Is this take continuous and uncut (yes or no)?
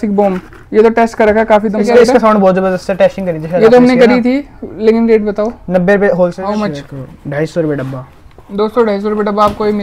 no